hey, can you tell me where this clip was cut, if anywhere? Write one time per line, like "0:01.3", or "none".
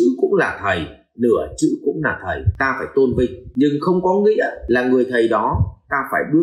0:02.5
0:03.4
0:04.6